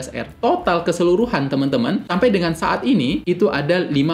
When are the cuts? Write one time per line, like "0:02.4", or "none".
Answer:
0:02.1
0:03.2